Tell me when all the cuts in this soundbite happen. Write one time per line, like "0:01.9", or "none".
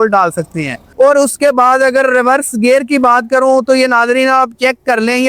none